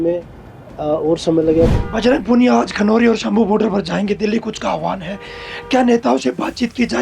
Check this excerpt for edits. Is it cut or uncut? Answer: cut